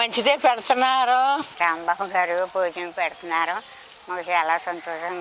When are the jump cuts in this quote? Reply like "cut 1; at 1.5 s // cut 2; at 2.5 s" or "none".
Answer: cut 1; at 1.5 s